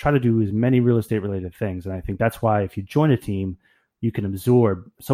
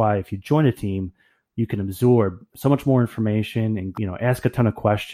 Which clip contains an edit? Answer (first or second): second